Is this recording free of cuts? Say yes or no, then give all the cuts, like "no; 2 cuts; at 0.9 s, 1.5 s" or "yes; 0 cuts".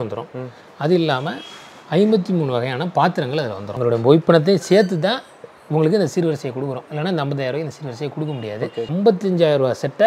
no; 2 cuts; at 3.7 s, 8.8 s